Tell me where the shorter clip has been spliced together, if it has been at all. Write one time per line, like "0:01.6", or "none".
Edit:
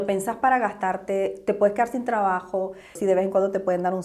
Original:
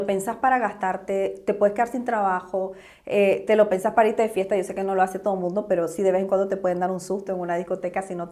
0:03.0